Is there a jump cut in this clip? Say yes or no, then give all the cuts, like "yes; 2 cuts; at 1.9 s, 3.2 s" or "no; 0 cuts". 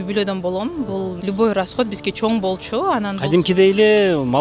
yes; 1 cut; at 1.2 s